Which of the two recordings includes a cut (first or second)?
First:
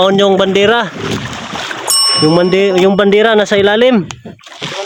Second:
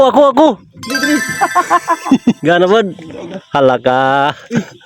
second